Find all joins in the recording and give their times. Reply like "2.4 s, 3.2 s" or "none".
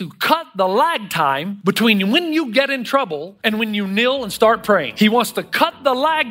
1.5 s, 3.3 s, 4.9 s